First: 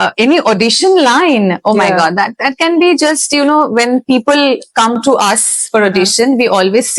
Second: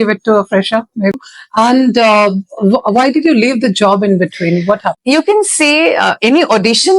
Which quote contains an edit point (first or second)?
second